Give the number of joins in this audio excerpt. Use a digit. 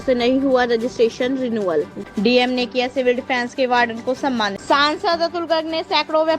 2